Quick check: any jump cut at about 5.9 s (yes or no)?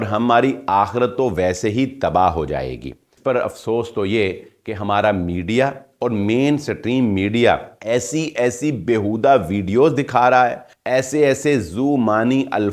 no